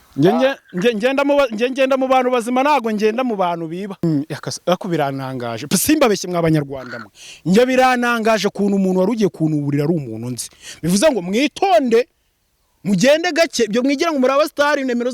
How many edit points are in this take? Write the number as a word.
one